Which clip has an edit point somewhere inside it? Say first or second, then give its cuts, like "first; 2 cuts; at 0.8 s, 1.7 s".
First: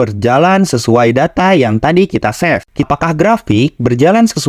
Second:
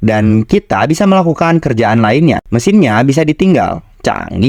first; 1 cut; at 2.9 s